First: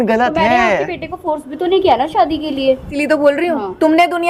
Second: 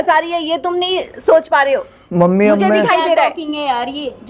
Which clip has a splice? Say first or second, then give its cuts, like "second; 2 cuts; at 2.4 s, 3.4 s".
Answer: first; 1 cut; at 2.9 s